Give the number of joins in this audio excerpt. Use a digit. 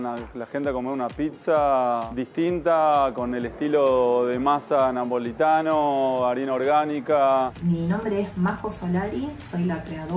1